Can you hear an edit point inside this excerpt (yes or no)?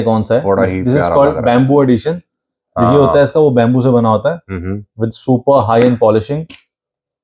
no